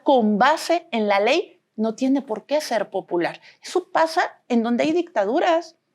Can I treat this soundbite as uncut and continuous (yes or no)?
no